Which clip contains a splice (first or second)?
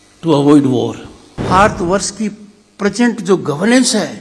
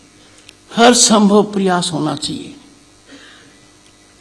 first